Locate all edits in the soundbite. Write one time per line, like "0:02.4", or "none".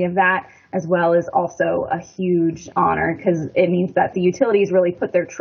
0:02.7
0:04.1